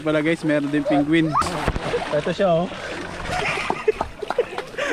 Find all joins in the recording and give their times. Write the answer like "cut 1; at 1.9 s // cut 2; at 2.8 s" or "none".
cut 1; at 1.5 s

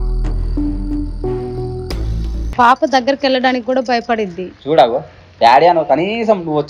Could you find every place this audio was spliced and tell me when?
cut 1; at 2.4 s

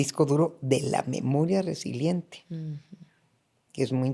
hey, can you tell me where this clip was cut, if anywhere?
none

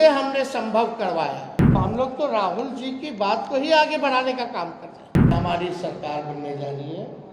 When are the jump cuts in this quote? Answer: cut 1; at 1.7 s // cut 2; at 5.3 s

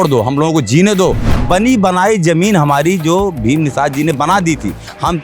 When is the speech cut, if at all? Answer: cut 1; at 1.3 s

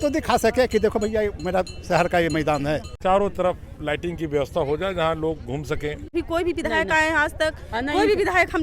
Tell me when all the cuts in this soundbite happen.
cut 1; at 2.9 s // cut 2; at 6.1 s

